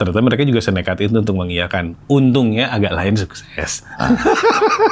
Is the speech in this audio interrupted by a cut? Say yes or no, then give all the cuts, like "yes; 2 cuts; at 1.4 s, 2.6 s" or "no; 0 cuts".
no; 0 cuts